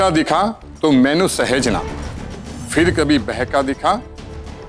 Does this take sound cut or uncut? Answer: cut